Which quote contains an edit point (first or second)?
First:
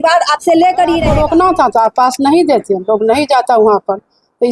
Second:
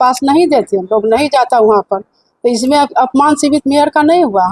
first